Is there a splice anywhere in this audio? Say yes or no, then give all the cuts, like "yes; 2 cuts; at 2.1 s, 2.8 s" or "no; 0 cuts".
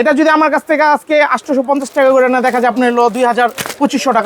no; 0 cuts